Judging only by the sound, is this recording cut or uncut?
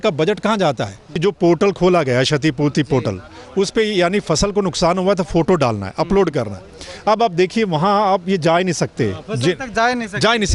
cut